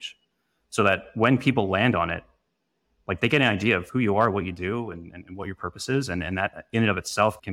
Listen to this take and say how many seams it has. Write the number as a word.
one